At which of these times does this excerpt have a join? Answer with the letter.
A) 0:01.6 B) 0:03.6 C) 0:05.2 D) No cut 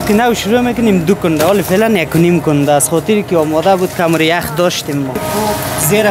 C